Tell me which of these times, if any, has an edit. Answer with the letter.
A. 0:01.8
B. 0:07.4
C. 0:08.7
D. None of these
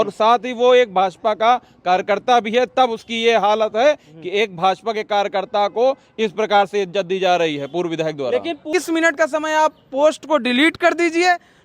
C